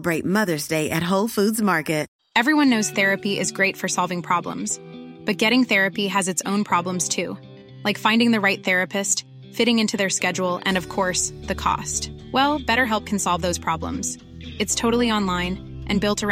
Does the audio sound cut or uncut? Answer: cut